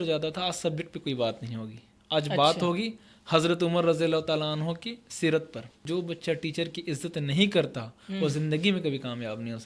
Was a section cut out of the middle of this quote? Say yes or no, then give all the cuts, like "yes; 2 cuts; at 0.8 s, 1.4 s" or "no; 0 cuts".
yes; 1 cut; at 5.7 s